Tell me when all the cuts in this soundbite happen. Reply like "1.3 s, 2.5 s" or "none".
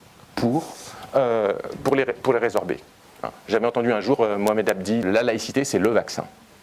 5.0 s